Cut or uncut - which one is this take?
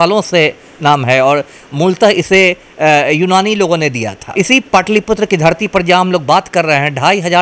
cut